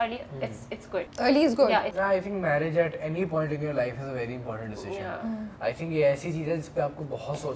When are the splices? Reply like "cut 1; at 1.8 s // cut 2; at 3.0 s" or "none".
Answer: cut 1; at 1.1 s // cut 2; at 1.9 s